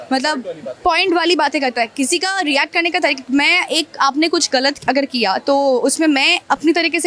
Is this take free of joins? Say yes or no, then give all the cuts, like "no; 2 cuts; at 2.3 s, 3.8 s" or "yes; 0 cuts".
yes; 0 cuts